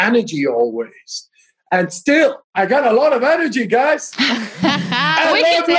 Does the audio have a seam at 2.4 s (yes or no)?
yes